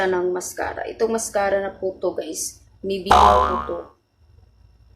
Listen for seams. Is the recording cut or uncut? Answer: cut